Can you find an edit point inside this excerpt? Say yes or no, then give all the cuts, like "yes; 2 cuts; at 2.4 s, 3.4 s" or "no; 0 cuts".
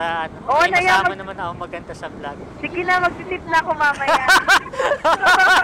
no; 0 cuts